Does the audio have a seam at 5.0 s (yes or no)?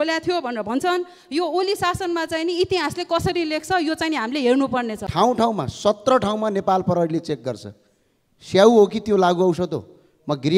yes